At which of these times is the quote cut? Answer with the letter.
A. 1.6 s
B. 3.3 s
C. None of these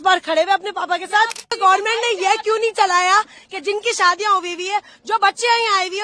A